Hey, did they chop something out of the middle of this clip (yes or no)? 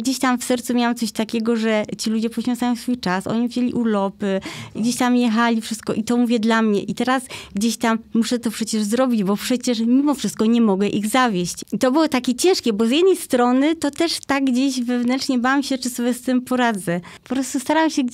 yes